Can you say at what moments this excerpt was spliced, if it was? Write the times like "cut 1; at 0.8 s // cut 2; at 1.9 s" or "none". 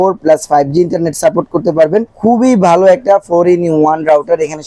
none

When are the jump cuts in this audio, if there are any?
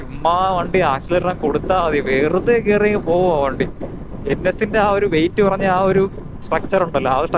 none

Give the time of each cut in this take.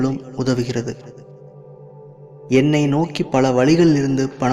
none

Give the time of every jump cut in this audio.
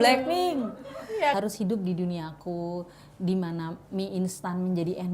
cut 1; at 1.3 s

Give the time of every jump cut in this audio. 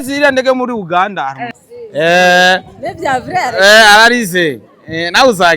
cut 1; at 1.7 s

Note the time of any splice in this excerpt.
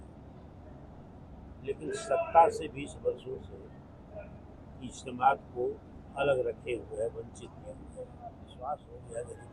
cut 1; at 8.5 s

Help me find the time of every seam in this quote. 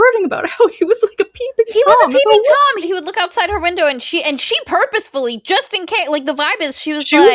cut 1; at 2.8 s

